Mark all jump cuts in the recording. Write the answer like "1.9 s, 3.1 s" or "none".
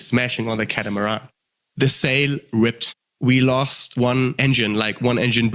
1.5 s, 3.1 s, 4.1 s